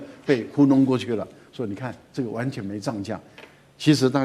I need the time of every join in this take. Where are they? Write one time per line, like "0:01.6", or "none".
none